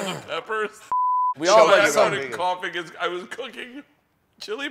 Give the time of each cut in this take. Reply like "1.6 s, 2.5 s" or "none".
1.1 s